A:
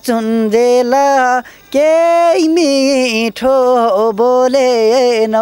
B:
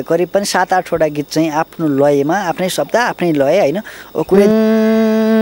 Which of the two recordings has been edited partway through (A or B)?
B